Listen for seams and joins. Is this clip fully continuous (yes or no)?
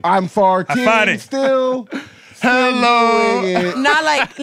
yes